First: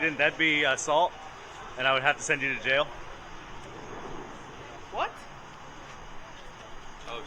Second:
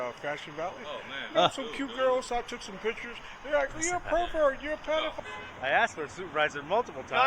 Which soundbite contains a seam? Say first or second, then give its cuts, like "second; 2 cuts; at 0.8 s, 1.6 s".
second; 1 cut; at 5.2 s